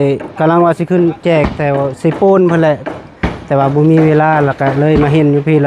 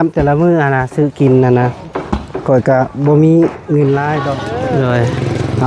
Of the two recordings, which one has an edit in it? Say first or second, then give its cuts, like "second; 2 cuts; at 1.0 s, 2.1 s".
second; 1 cut; at 4.4 s